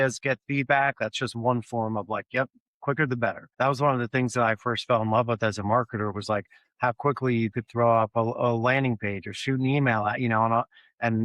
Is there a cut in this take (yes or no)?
yes